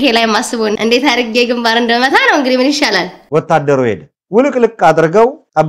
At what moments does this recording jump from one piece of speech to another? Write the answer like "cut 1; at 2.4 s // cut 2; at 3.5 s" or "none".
none